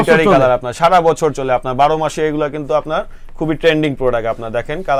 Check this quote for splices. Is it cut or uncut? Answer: uncut